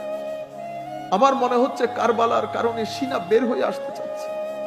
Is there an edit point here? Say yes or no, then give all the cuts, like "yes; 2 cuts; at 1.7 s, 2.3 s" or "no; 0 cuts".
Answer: yes; 1 cut; at 0.9 s